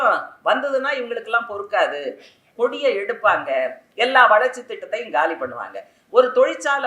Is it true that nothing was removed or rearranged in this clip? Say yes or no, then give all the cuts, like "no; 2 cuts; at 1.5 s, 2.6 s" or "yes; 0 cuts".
no; 2 cuts; at 2.4 s, 3.8 s